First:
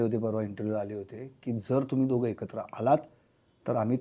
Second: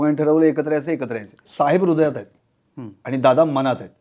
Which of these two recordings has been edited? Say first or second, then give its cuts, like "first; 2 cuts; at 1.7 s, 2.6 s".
second; 1 cut; at 1.4 s